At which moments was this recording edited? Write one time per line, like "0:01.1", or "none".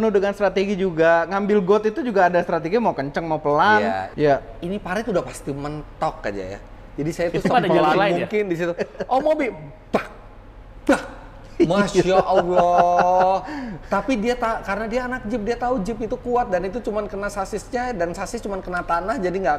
0:04.1